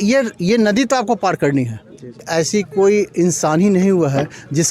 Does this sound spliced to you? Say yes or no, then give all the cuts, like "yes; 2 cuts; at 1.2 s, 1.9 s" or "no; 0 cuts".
yes; 1 cut; at 2.3 s